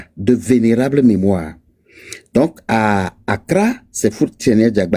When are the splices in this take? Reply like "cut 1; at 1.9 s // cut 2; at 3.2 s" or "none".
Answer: none